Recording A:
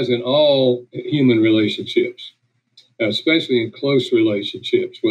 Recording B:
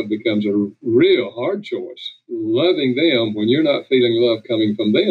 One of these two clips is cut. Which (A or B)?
A